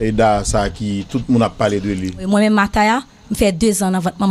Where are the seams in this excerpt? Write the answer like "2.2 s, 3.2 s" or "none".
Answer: 2.3 s